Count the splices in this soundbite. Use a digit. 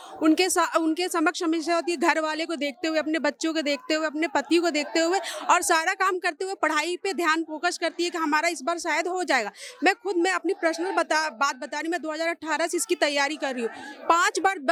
0